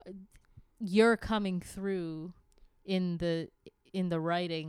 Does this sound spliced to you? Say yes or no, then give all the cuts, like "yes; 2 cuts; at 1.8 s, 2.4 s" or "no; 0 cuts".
no; 0 cuts